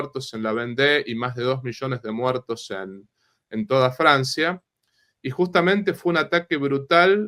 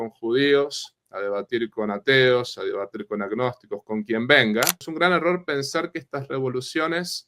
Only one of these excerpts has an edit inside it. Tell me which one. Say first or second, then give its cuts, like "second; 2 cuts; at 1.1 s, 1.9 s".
second; 1 cut; at 4.8 s